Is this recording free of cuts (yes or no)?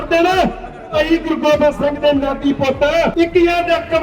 no